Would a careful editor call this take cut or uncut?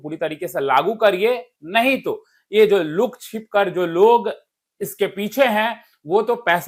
uncut